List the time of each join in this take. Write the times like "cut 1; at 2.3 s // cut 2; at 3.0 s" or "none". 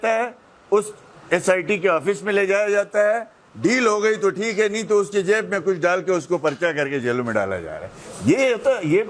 none